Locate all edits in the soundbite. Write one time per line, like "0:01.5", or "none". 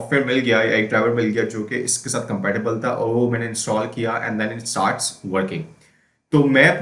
none